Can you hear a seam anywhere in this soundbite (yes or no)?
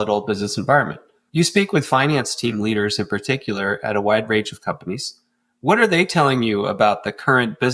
yes